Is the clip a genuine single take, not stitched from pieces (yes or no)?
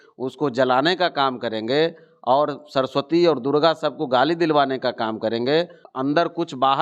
no